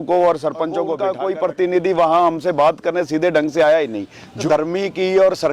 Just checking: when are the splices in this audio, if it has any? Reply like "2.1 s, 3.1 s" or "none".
1.0 s, 4.4 s